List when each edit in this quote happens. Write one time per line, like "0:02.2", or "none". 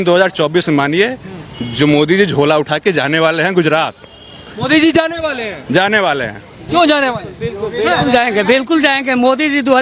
none

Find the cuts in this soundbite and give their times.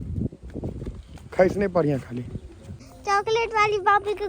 0:02.9

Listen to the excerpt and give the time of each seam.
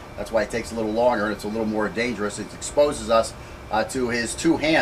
0:03.4

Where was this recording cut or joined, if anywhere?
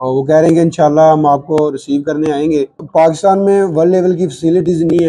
0:02.8

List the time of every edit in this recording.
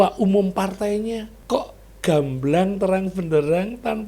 0:01.3

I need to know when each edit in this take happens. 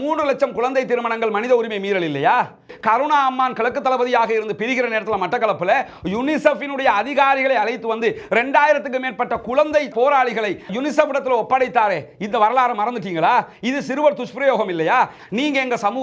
0:02.7
0:15.2

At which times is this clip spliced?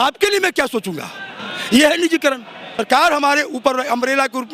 0:02.8

